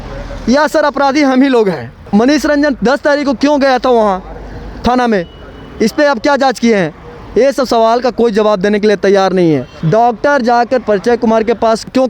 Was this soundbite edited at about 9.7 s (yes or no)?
yes